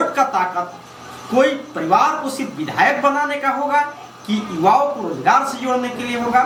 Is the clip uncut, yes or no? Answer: yes